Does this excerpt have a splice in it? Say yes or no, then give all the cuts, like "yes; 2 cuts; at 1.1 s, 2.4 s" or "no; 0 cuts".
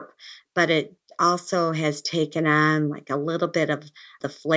no; 0 cuts